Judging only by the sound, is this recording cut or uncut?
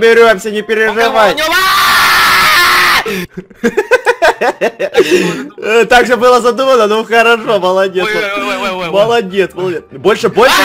uncut